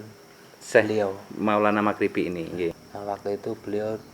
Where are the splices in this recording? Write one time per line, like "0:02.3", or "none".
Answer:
0:02.8